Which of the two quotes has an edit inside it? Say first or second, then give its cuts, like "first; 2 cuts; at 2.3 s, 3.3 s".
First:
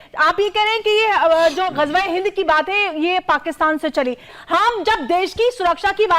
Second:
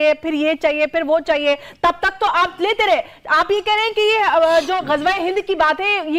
first; 1 cut; at 4.3 s